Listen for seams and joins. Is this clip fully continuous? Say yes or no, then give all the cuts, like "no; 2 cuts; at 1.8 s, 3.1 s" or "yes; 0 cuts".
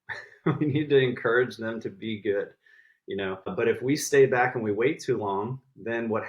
no; 1 cut; at 3.5 s